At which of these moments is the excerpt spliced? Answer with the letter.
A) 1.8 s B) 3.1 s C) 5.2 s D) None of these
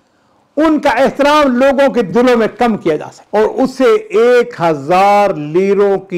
B